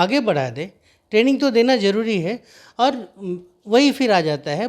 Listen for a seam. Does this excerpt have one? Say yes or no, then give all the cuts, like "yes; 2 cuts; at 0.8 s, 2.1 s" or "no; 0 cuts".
no; 0 cuts